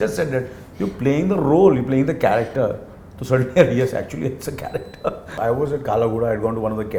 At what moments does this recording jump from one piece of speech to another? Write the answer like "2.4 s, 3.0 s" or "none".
5.3 s